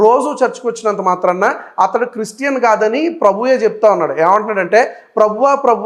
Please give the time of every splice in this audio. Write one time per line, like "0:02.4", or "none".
none